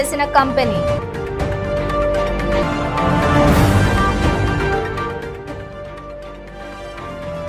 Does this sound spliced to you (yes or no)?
no